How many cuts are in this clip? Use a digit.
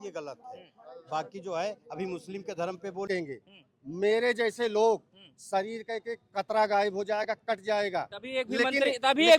1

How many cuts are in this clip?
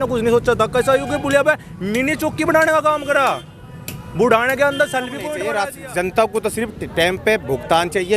1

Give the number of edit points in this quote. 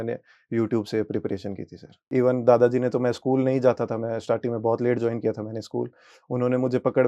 1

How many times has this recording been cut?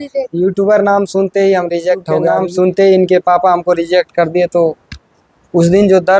1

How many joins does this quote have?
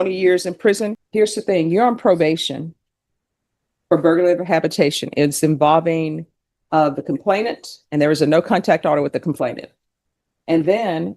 1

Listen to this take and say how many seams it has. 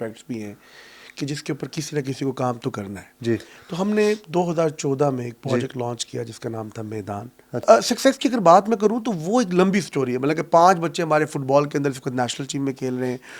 1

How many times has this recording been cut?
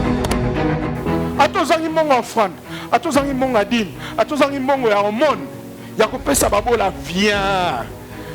1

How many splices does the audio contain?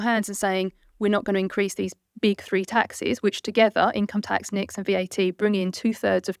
0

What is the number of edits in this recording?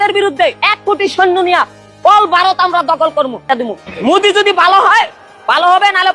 1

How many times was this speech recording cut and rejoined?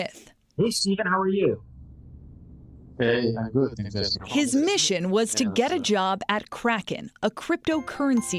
0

